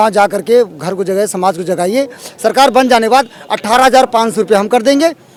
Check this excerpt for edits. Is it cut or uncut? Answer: uncut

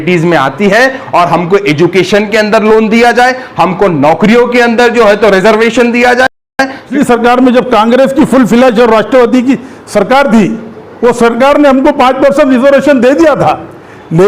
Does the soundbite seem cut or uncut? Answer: cut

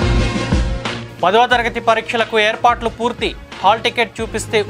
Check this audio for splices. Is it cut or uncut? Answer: cut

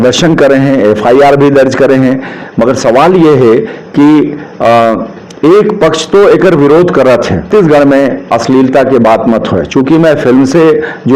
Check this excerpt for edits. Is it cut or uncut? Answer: cut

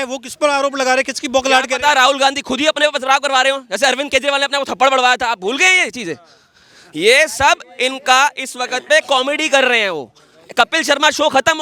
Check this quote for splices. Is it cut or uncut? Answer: uncut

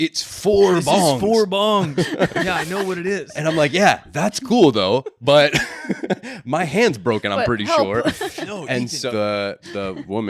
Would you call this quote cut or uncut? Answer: cut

